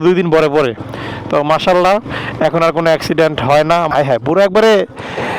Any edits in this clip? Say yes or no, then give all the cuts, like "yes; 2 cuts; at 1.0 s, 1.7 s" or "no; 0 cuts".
yes; 1 cut; at 3.9 s